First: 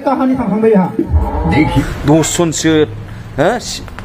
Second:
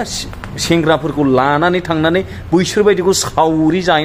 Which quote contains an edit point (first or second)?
first